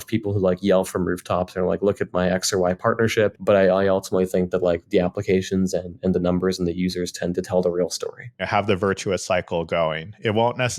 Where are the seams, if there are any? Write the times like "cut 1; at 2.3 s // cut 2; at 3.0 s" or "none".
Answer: cut 1; at 3.4 s // cut 2; at 8.4 s